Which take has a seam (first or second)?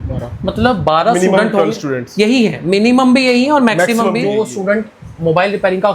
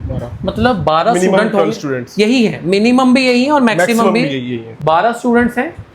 first